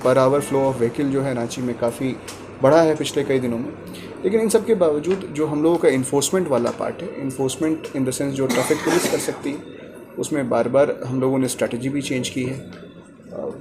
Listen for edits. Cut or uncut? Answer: uncut